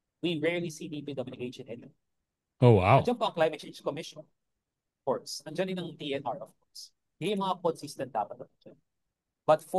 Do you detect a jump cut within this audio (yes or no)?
no